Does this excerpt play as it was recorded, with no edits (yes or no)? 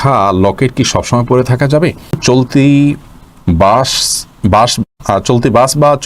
no